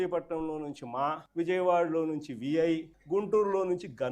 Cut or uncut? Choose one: cut